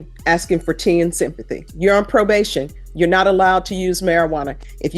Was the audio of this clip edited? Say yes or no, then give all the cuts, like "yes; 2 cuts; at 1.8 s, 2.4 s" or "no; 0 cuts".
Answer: yes; 1 cut; at 1.6 s